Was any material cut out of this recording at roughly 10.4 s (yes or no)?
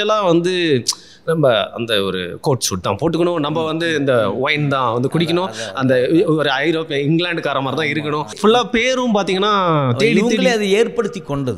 no